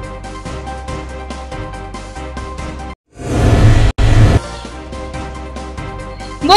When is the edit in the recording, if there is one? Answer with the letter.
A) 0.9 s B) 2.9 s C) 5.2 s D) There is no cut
B